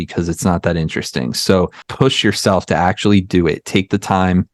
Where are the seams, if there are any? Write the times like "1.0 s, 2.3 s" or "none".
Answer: 1.8 s